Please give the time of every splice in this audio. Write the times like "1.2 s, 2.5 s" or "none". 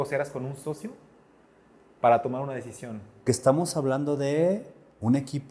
3.2 s